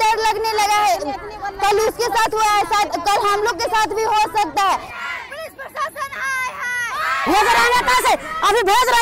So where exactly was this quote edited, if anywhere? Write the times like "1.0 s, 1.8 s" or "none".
5.0 s, 7.1 s